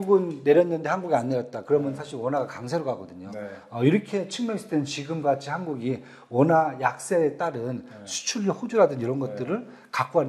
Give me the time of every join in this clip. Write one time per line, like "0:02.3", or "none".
none